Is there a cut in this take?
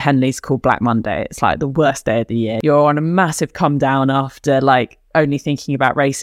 yes; 1 cut; at 2.5 s

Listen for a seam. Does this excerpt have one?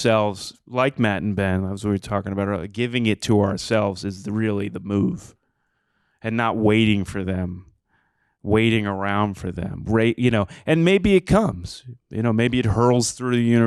no; 0 cuts

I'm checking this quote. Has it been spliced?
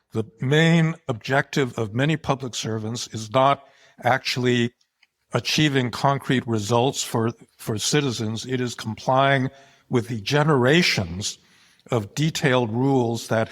yes; 1 cut; at 1.1 s

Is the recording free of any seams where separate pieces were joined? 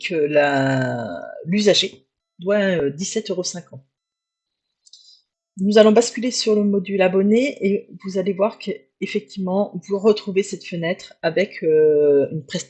yes; 0 cuts

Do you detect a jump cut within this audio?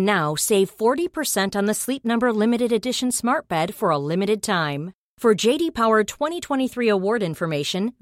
no; 0 cuts

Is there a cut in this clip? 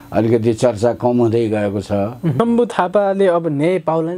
yes; 1 cut; at 2.3 s

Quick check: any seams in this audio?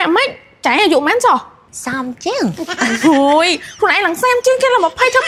no; 0 cuts

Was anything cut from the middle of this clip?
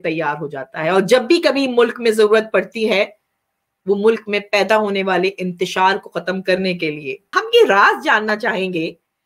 yes; 1 cut; at 7.1 s

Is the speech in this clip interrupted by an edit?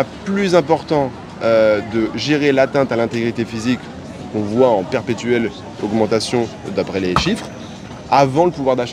no; 0 cuts

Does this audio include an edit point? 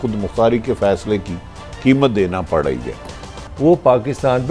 yes; 1 cut; at 3.4 s

